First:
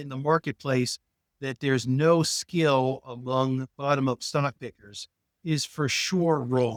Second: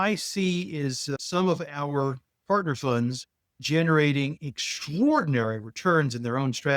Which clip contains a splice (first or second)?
second